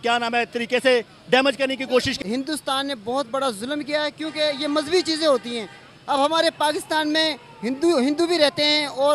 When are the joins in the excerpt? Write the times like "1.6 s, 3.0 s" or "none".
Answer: 2.1 s